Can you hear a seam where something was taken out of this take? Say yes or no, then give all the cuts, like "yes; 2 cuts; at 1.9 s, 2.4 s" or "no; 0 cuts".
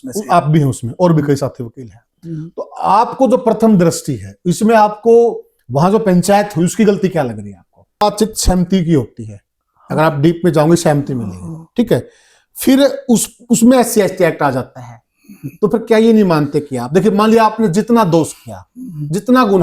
yes; 1 cut; at 8.0 s